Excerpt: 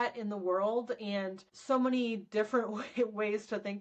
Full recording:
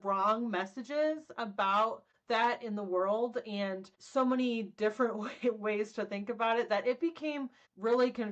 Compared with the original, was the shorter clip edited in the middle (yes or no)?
no